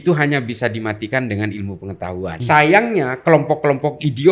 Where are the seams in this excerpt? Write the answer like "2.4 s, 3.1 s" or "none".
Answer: 2.4 s